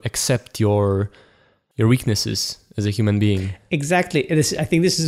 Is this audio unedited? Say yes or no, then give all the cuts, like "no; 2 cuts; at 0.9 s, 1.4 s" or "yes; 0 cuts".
no; 1 cut; at 3.5 s